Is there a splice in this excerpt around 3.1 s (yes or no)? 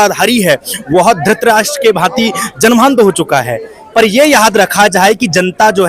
no